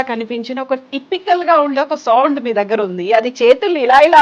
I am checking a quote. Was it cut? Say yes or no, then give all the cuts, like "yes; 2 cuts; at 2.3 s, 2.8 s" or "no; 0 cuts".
no; 0 cuts